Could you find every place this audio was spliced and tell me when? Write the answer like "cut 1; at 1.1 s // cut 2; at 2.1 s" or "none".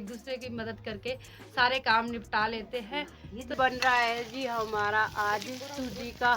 cut 1; at 3.5 s